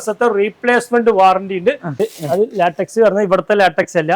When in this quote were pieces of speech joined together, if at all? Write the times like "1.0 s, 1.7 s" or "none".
2.0 s